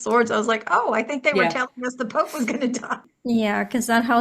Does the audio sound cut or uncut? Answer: cut